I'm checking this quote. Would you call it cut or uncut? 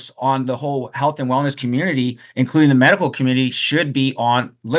uncut